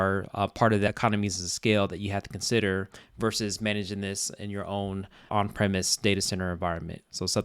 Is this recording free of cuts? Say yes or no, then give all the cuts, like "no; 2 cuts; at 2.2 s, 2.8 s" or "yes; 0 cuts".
no; 2 cuts; at 0.9 s, 5.3 s